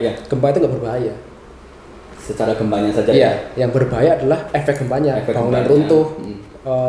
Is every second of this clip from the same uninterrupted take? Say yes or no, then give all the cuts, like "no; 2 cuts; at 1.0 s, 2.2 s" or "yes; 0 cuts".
yes; 0 cuts